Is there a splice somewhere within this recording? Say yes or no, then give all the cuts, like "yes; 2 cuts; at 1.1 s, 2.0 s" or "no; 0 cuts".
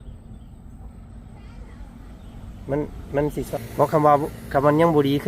yes; 1 cut; at 3.5 s